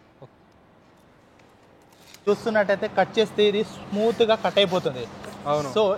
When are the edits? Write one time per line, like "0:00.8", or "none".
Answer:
0:02.1